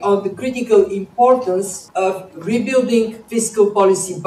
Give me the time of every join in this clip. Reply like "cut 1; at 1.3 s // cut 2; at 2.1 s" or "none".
cut 1; at 1.8 s // cut 2; at 3.2 s